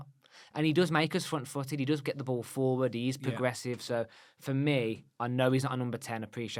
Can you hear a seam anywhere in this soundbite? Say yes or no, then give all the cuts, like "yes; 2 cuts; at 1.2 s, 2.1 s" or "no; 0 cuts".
no; 0 cuts